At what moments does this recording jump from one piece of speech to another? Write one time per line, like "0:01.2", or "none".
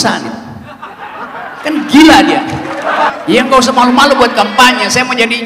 0:03.1

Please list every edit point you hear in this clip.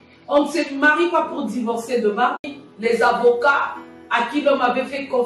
0:02.6

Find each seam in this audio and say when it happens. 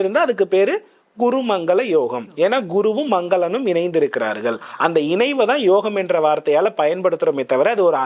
none

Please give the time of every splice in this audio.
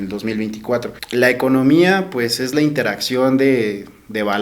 0:01.0

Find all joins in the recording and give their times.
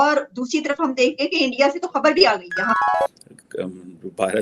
0:03.0

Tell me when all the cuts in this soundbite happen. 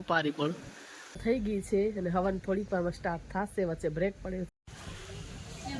0:01.2
0:04.5

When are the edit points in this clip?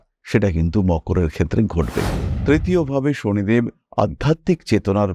0:02.3

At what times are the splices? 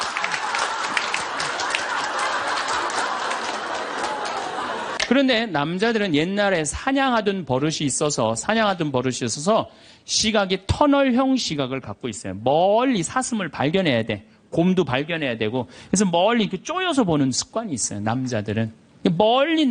0:04.9

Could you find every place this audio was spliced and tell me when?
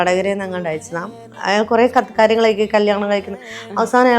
0:01.2

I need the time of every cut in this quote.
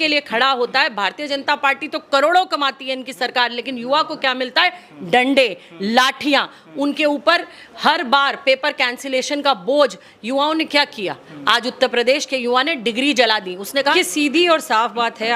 0:13.9

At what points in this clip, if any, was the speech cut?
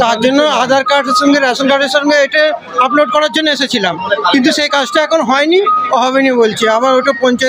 none

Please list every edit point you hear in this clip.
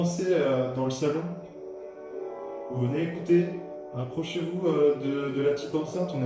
none

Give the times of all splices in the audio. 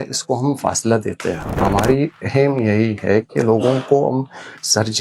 0:01.6

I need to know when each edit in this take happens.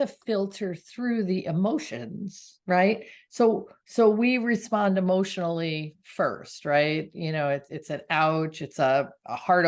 none

